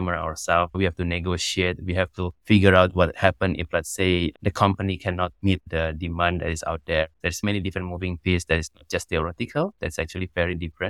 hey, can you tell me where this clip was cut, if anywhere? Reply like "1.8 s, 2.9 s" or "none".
7.4 s